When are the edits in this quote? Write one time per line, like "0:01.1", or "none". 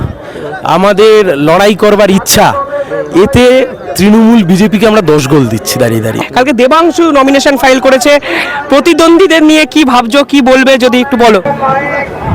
0:06.2
0:11.4